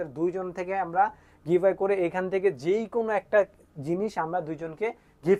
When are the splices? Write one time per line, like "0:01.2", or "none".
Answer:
none